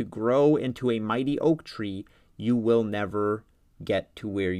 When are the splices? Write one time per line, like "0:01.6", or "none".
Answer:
none